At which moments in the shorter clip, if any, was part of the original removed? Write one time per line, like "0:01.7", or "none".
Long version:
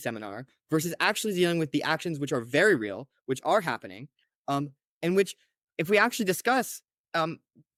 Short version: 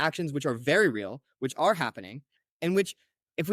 0:02.4